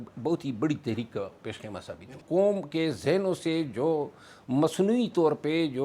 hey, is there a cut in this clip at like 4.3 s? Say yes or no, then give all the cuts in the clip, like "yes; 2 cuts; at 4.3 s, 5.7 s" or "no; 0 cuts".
no; 1 cut; at 2.2 s